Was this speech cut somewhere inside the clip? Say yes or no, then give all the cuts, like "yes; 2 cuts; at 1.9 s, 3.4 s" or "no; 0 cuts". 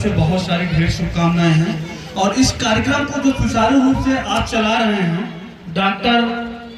no; 0 cuts